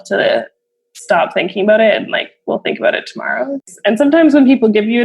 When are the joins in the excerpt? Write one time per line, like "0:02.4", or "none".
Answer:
0:03.6